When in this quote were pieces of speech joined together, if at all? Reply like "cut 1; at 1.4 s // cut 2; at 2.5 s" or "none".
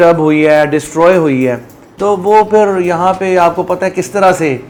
none